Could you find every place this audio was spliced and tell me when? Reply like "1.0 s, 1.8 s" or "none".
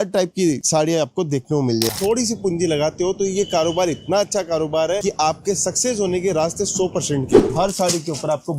1.9 s, 7.5 s